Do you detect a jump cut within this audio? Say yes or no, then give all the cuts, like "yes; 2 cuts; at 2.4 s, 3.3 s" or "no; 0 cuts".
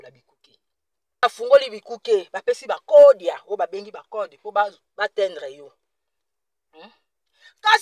yes; 1 cut; at 1.2 s